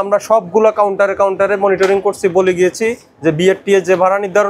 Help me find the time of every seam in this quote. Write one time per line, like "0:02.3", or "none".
none